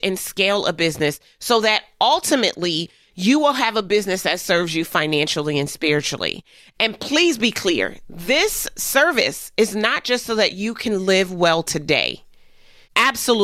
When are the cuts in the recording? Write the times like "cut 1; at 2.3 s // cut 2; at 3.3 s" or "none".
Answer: none